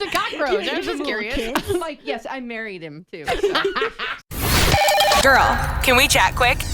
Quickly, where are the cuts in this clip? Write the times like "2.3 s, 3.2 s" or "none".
4.1 s